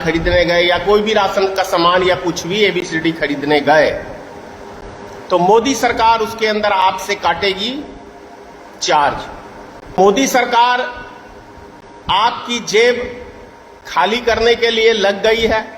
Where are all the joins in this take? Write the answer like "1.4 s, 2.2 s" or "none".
10.0 s